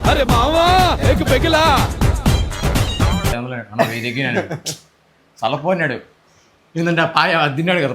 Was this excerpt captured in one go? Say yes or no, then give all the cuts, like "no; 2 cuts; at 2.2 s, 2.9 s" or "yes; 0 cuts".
no; 1 cut; at 3.3 s